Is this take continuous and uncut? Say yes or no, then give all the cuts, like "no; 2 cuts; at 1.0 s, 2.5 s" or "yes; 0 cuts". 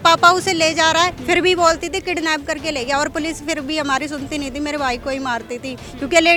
yes; 0 cuts